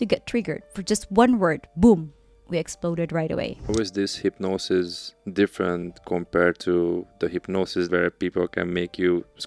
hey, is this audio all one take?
no; 2 cuts; at 3.7 s, 7.9 s

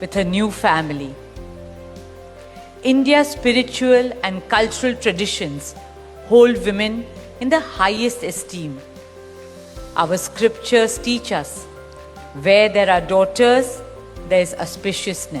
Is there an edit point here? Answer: yes; 2 cuts; at 1.3 s, 2.8 s

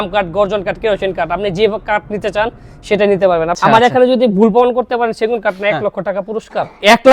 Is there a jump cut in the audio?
yes; 1 cut; at 3.5 s

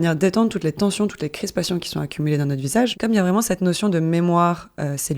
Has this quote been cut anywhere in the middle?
yes; 1 cut; at 2.9 s

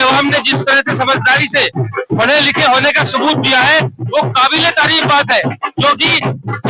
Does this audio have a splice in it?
no; 0 cuts

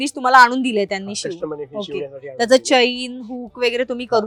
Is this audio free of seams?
yes; 0 cuts

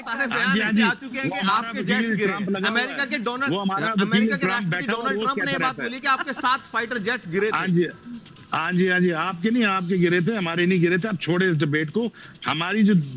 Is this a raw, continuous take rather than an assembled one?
yes; 0 cuts

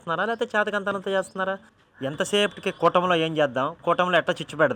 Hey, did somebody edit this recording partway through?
yes; 1 cut; at 1.7 s

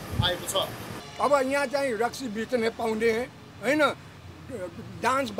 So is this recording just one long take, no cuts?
no; 1 cut; at 1.0 s

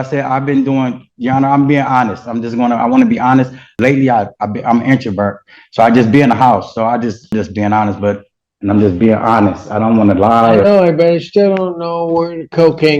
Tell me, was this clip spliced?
yes; 3 cuts; at 3.7 s, 7.3 s, 8.3 s

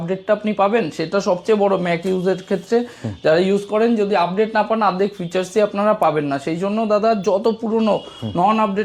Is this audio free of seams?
yes; 0 cuts

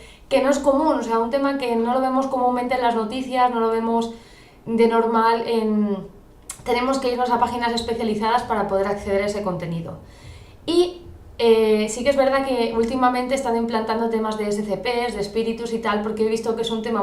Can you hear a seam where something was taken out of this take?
yes; 1 cut; at 14.7 s

